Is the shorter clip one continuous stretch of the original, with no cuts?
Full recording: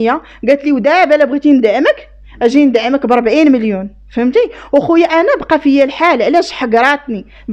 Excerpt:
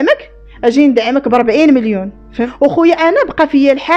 no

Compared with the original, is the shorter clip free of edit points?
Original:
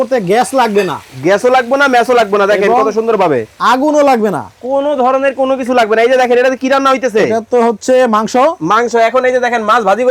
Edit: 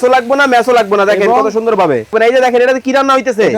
no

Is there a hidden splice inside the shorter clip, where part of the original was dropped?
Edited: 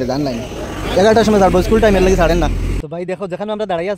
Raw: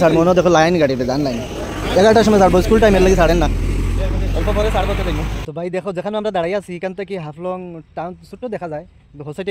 yes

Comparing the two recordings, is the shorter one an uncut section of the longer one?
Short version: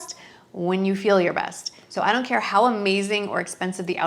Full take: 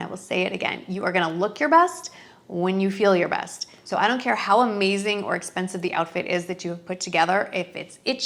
yes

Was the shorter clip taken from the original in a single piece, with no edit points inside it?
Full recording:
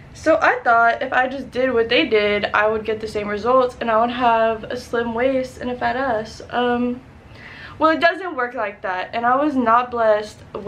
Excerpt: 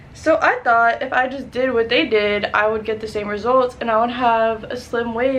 yes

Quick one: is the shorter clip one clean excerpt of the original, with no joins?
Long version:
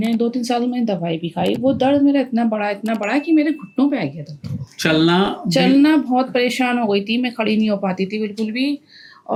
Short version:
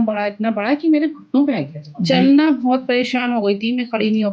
no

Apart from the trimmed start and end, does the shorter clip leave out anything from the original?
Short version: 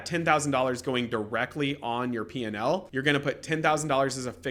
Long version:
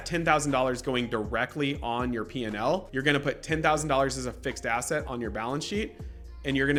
no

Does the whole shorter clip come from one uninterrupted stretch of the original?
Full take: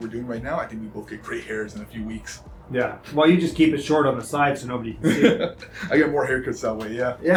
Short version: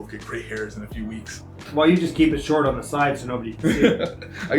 no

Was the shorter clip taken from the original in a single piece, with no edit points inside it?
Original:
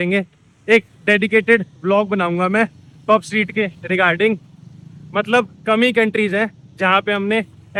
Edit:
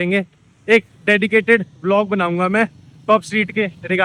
yes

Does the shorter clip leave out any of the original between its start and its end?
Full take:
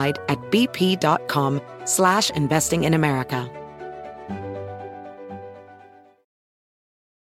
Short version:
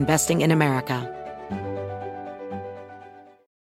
yes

